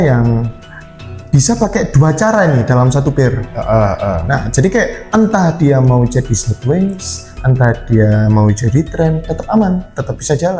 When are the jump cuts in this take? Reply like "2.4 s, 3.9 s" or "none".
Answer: none